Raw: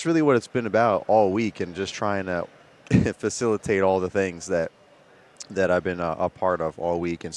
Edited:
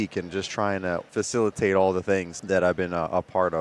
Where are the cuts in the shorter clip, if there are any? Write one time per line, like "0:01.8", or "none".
0:01.1
0:02.3